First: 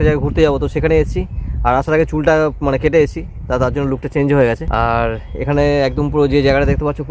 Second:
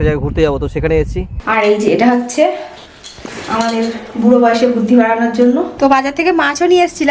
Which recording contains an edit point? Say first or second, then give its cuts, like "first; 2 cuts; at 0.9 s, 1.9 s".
second; 2 cuts; at 1.3 s, 5.7 s